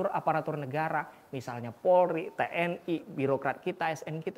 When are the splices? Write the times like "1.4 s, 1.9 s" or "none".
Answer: none